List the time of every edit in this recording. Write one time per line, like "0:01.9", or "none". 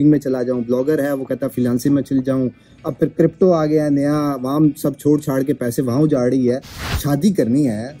0:06.7